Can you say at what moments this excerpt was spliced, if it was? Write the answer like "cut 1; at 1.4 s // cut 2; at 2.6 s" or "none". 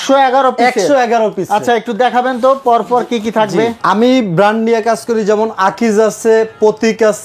cut 1; at 3.8 s